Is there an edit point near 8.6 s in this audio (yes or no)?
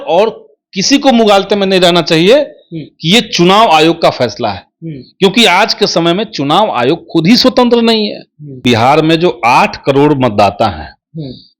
yes